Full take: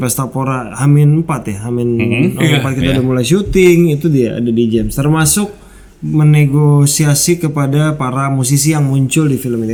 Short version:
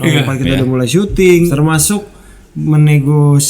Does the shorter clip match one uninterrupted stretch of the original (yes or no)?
no